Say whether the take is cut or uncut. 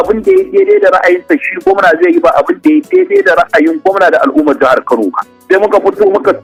uncut